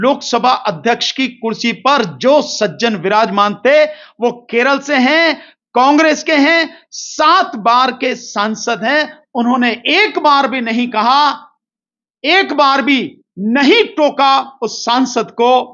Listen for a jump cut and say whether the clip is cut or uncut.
uncut